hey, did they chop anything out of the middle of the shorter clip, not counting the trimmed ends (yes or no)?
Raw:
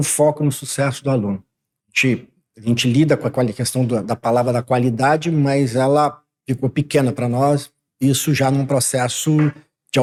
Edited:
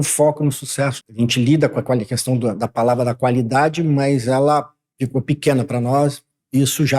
yes